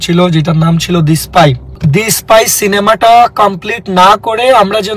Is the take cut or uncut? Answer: cut